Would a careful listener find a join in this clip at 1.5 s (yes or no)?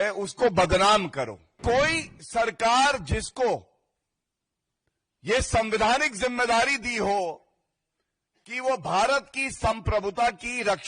yes